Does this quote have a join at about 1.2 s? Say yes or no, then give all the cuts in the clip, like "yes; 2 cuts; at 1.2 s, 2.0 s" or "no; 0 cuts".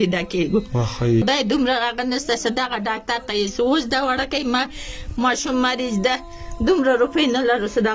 yes; 1 cut; at 1.2 s